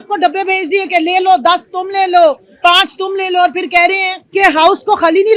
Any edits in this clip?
yes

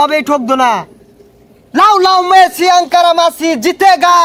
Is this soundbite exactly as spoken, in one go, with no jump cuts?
yes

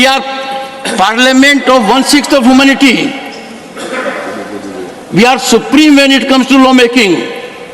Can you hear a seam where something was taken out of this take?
no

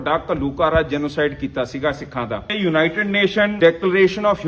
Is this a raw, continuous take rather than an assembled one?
no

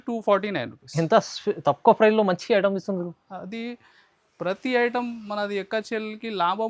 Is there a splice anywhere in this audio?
no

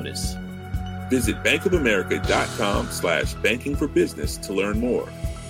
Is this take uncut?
yes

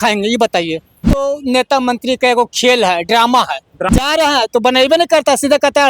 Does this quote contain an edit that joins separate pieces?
yes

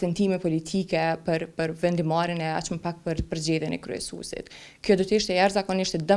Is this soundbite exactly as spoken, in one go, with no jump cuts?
yes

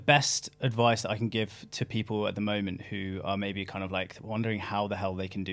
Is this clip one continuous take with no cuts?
yes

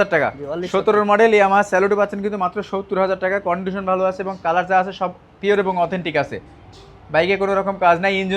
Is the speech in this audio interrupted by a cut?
no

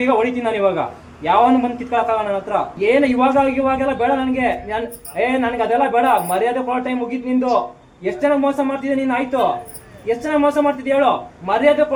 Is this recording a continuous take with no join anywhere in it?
yes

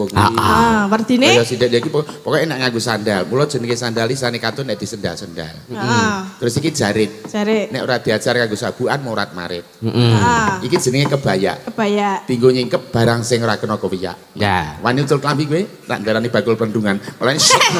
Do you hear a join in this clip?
no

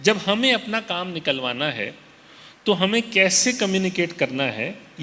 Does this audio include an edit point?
no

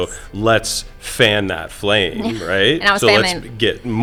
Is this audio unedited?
yes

